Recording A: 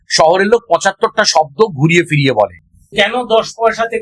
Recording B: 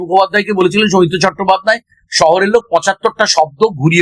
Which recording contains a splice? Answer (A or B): A